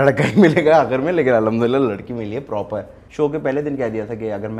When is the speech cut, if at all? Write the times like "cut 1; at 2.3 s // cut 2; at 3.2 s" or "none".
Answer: cut 1; at 3.0 s